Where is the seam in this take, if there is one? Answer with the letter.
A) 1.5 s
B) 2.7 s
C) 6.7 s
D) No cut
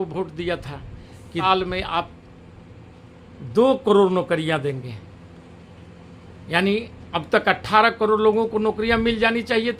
A